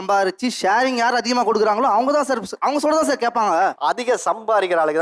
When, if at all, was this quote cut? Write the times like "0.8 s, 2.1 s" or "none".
3.8 s

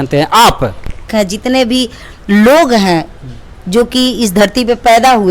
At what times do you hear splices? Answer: 1.1 s

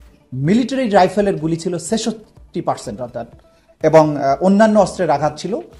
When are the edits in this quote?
none

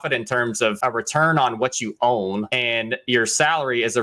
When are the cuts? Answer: 0.8 s, 2.5 s

